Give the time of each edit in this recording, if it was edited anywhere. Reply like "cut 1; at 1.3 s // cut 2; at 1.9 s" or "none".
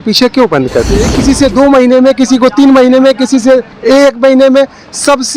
cut 1; at 1.0 s

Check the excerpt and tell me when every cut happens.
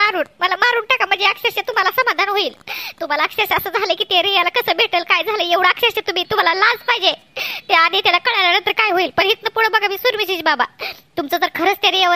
none

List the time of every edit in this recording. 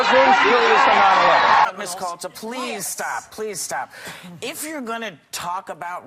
cut 1; at 1.7 s

